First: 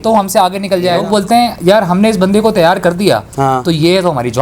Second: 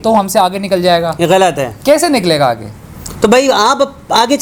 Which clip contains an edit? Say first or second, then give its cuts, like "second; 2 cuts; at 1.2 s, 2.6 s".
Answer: first; 1 cut; at 1.2 s